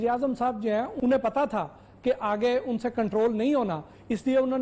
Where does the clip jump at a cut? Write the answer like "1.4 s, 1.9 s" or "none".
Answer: 0.9 s